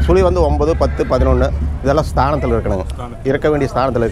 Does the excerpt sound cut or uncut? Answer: uncut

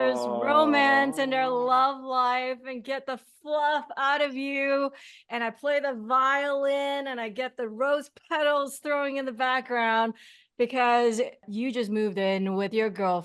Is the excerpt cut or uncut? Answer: cut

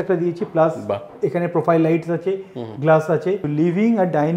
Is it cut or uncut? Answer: cut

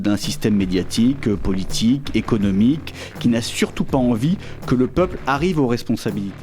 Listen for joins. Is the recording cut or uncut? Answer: uncut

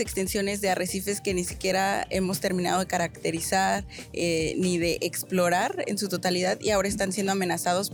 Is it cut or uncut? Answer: uncut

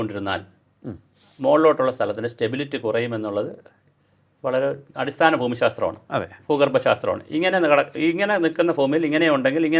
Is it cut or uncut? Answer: uncut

